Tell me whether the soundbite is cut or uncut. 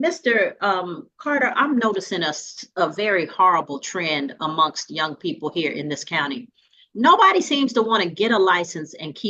uncut